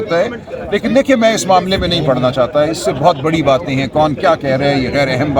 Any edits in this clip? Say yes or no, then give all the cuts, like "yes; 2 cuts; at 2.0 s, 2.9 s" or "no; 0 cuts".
no; 0 cuts